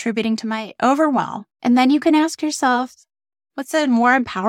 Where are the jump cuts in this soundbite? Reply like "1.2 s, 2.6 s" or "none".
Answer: 1.4 s